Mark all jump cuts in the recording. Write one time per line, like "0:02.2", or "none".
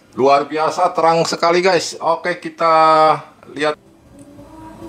0:03.8

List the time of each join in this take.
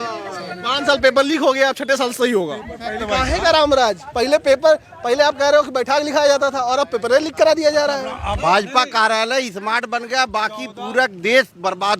0:03.0
0:08.3

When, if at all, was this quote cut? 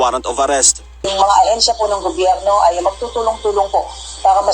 0:01.1

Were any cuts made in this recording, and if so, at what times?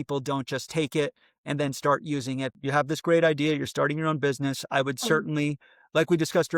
0:02.6

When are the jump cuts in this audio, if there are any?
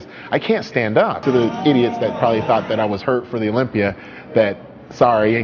0:01.2

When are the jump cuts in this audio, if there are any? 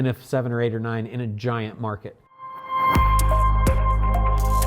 0:02.1

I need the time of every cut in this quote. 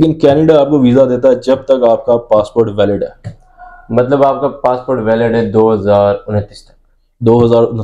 none

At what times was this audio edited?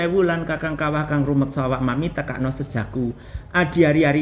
none

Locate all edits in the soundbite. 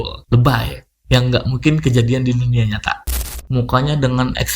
0:03.3

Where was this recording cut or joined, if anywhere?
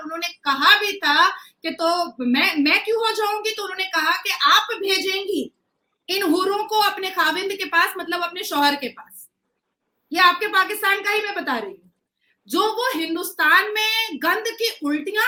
none

